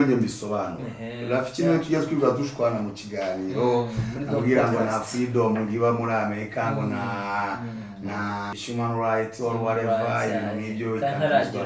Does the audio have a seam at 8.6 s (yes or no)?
yes